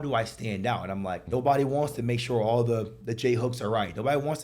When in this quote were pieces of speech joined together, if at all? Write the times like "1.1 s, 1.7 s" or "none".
1.2 s